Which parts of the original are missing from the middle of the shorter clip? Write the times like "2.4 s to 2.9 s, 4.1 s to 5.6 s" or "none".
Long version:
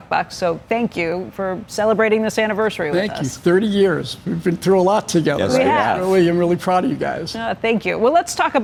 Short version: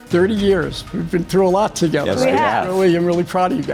none